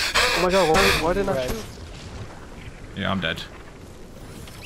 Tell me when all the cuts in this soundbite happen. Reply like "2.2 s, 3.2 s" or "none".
1.3 s